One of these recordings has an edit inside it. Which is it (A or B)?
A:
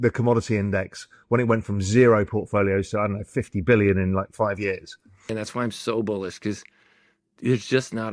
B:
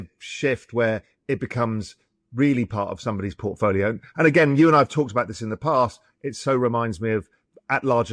A